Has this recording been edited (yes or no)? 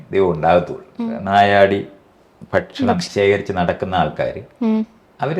yes